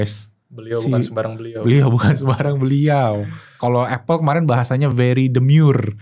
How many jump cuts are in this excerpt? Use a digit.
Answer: 1